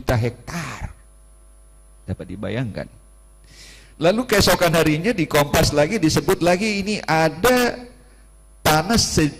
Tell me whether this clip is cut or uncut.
uncut